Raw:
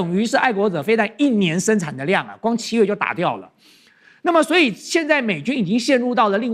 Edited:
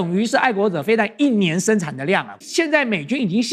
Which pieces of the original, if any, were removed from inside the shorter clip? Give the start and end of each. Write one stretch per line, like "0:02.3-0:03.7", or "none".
0:02.4-0:04.7